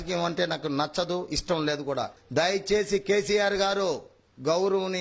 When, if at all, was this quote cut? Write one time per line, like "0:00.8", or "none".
0:02.2